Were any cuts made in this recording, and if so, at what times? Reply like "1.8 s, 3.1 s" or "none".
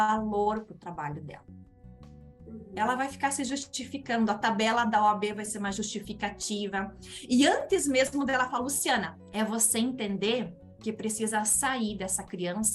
9.2 s